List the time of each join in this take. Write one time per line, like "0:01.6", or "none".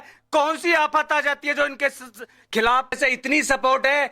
0:03.0

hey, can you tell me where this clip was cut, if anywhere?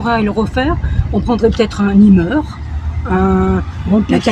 none

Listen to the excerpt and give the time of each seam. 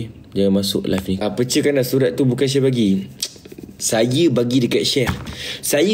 0:01.2

